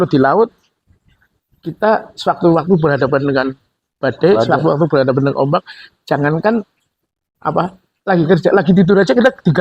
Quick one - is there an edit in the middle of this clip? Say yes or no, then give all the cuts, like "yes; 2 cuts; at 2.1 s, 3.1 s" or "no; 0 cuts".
no; 0 cuts